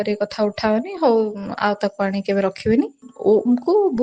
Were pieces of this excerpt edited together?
yes; 1 cut; at 3.0 s

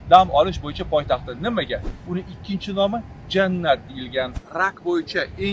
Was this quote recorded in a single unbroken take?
no; 2 cuts; at 2.0 s, 4.4 s

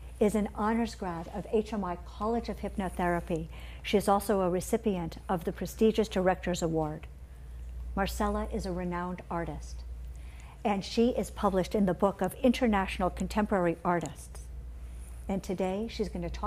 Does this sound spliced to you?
no; 0 cuts

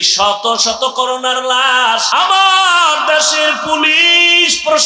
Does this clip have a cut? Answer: yes; 1 cut; at 2.1 s

